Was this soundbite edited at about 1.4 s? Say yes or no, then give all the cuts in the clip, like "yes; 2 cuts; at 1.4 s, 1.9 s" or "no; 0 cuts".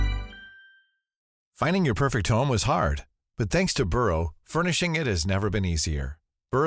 yes; 1 cut; at 1.4 s